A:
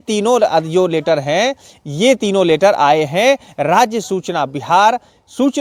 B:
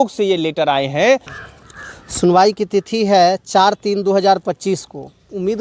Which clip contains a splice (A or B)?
B